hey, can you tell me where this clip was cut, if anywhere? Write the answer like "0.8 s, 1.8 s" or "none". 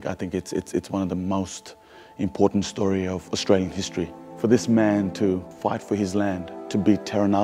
4.2 s, 5.5 s, 6.6 s